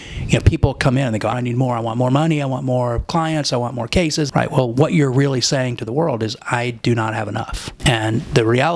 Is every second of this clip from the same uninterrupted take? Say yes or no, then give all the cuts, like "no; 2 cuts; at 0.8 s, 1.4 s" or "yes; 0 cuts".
no; 3 cuts; at 1.3 s, 4.3 s, 7.7 s